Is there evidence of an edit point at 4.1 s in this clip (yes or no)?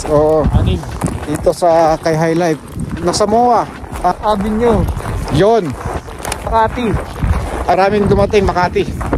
yes